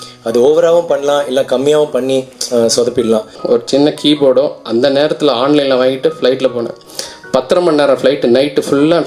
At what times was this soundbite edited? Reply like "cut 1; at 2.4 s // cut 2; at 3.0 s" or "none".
cut 1; at 3.4 s